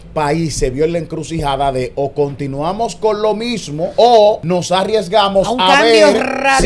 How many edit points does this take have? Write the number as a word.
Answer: two